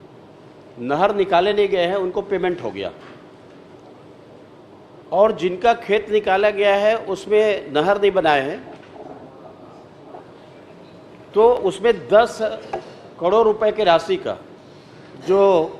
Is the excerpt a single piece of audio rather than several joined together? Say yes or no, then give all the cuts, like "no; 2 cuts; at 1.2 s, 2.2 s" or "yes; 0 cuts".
yes; 0 cuts